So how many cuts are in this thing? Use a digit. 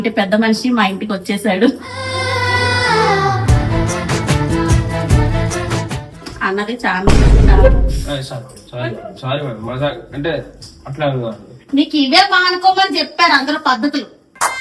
1